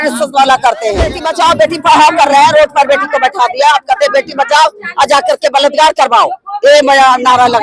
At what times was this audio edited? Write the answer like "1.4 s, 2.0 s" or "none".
1.2 s